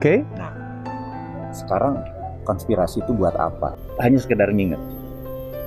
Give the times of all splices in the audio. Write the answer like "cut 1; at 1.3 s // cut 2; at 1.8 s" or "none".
cut 1; at 3.8 s